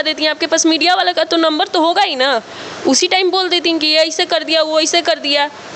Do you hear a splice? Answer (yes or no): no